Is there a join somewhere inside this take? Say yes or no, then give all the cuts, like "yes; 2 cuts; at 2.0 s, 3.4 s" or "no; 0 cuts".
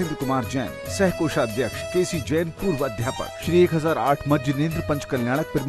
yes; 2 cuts; at 1.8 s, 3.4 s